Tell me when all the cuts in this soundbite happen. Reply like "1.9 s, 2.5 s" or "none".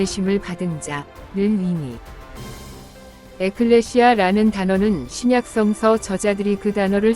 none